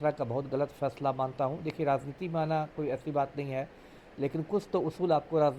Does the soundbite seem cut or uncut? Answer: uncut